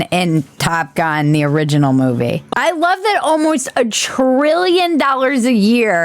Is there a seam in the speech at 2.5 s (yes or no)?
yes